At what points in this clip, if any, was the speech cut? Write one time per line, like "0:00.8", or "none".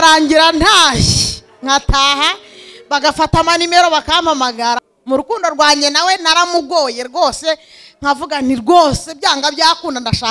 0:04.9